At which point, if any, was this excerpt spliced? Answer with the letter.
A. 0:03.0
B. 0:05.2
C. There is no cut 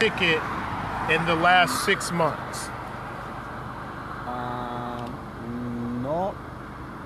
C